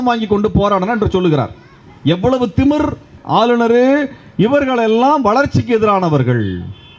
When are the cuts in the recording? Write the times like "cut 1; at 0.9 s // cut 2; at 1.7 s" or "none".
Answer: cut 1; at 3.2 s